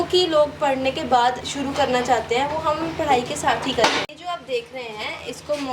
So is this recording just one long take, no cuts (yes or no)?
no